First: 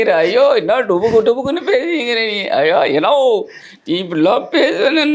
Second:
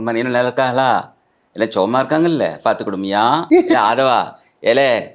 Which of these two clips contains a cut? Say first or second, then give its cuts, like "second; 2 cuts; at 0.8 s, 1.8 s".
second; 1 cut; at 3.4 s